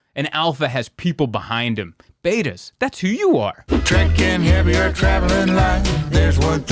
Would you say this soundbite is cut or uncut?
cut